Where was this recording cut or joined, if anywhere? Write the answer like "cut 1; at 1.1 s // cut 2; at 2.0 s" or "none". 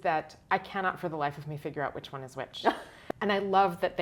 cut 1; at 3.0 s